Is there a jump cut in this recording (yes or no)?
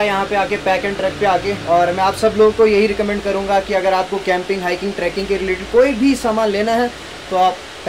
no